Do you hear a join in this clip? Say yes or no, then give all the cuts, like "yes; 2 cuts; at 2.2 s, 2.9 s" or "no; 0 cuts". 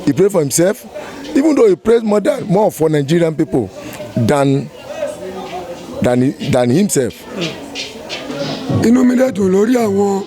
yes; 1 cut; at 8.3 s